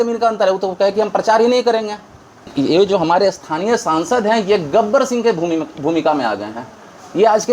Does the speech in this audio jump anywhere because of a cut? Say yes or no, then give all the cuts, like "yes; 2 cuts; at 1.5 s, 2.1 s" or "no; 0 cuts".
yes; 1 cut; at 2.5 s